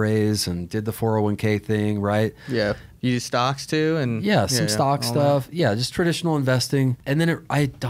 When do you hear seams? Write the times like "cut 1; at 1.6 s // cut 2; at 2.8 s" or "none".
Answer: cut 1; at 2.9 s // cut 2; at 7.0 s